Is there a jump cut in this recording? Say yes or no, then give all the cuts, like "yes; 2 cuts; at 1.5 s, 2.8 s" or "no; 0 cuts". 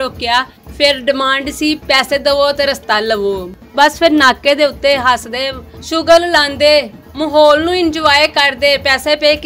no; 0 cuts